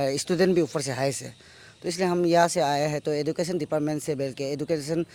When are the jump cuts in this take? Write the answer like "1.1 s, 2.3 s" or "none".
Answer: none